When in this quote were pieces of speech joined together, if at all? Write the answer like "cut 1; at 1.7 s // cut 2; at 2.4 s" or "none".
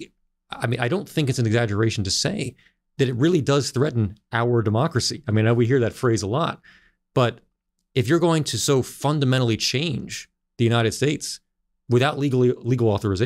none